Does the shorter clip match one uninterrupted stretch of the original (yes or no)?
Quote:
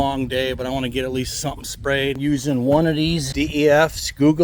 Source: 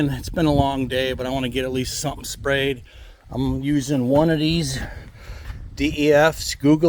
no